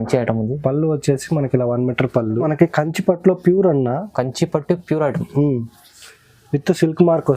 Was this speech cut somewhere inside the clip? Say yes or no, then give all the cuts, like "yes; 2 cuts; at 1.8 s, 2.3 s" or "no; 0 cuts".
yes; 1 cut; at 2.4 s